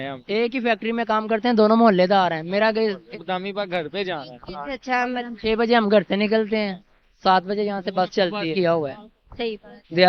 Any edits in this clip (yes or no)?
yes